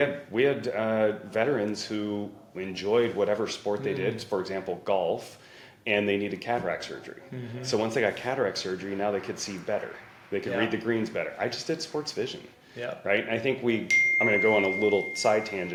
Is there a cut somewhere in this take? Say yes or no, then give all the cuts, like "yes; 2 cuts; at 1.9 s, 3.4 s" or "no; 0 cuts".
no; 0 cuts